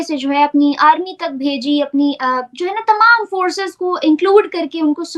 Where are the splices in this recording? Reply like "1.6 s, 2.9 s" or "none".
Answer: none